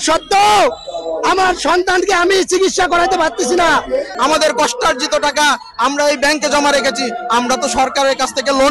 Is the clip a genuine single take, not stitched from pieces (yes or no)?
no